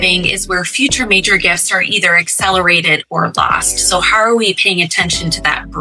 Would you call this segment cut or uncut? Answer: uncut